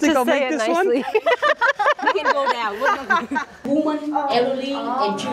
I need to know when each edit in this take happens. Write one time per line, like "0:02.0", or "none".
0:03.7